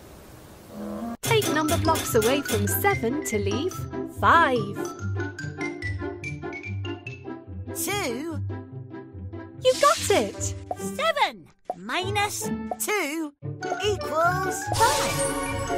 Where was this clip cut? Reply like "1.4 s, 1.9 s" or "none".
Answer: 1.1 s